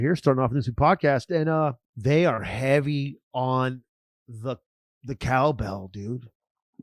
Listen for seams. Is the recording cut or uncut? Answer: cut